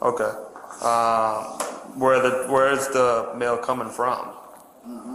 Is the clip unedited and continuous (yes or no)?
yes